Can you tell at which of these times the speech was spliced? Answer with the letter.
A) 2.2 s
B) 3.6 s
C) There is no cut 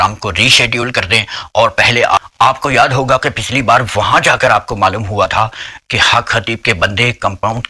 A